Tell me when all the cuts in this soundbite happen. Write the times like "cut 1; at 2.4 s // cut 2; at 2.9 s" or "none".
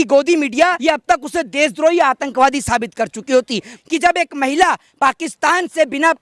cut 1; at 0.8 s // cut 2; at 3.7 s

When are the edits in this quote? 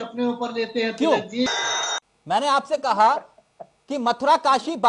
cut 1; at 1.7 s

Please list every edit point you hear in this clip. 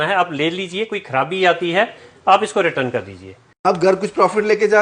cut 1; at 3.7 s

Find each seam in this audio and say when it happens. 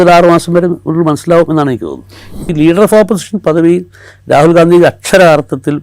cut 1; at 2.4 s

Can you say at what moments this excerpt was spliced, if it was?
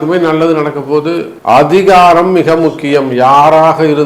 cut 1; at 1.3 s

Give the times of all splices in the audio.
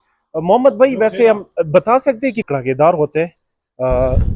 cut 1; at 2.5 s

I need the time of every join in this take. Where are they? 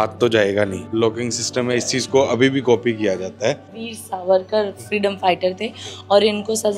cut 1; at 0.9 s // cut 2; at 3.7 s

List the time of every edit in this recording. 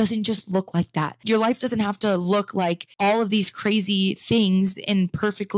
cut 1; at 1.2 s // cut 2; at 2.9 s

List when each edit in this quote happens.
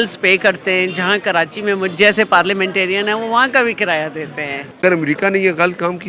cut 1; at 4.8 s

